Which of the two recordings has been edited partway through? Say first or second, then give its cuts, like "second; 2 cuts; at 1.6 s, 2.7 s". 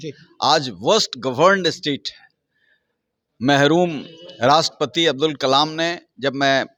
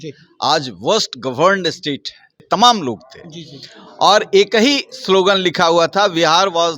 second; 1 cut; at 2.4 s